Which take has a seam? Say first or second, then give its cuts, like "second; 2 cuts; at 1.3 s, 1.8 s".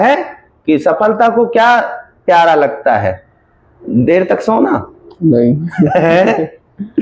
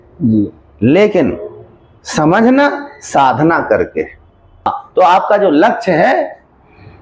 second; 1 cut; at 4.8 s